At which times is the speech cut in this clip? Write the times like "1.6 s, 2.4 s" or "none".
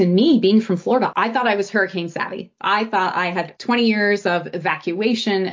1.1 s, 3.5 s